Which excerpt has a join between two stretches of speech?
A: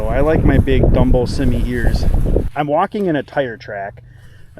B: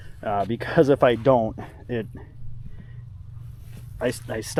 A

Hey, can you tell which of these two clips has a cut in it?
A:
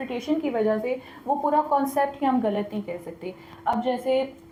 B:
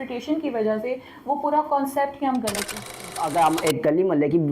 B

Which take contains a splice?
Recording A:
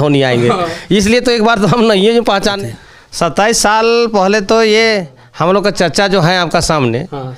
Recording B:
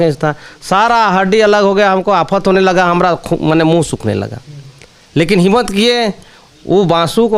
A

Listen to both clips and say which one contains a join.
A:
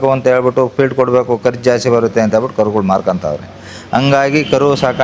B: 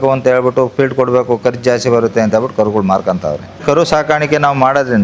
B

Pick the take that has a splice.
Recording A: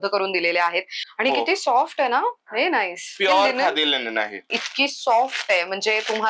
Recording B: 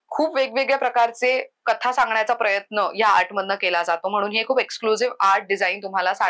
A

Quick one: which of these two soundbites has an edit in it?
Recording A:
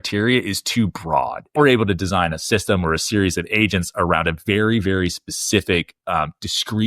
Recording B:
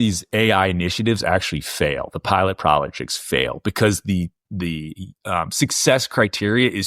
A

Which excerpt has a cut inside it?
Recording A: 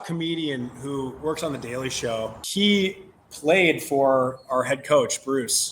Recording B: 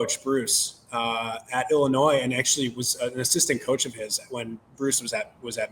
A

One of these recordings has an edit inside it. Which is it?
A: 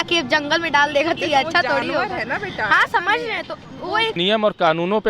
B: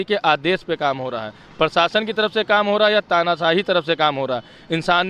A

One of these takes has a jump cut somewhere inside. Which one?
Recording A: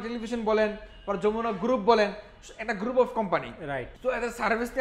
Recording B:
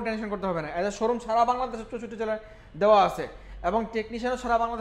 A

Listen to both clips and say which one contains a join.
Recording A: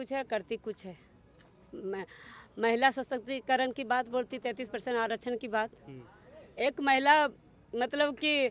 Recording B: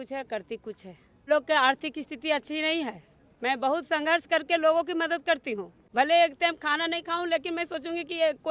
B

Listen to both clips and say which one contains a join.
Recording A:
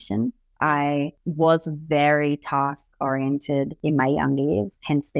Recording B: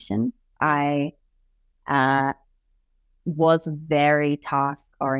A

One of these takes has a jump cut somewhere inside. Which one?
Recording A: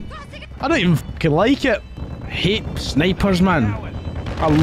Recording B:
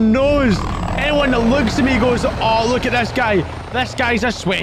A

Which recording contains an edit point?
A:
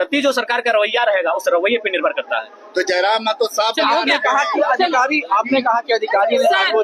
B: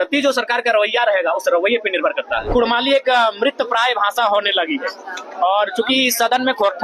B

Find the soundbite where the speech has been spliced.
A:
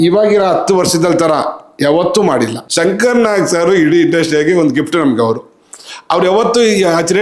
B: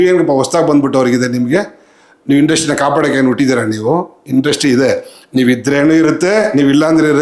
A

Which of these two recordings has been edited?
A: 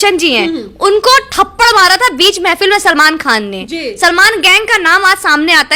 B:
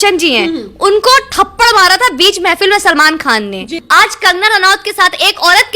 B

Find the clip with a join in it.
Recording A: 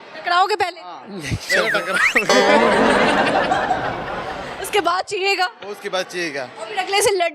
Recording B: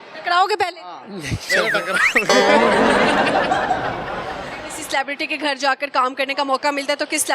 B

